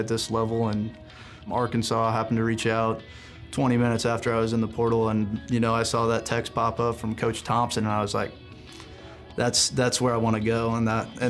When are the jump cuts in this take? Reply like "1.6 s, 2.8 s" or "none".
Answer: 1.4 s